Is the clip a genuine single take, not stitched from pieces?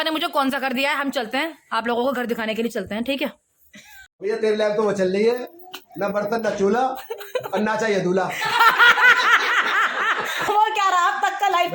no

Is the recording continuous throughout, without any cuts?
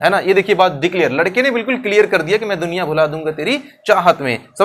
yes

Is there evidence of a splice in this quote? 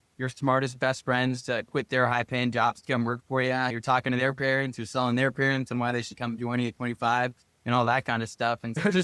no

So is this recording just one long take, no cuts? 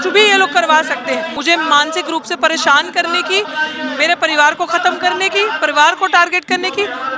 no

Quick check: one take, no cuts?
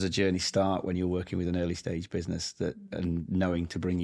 yes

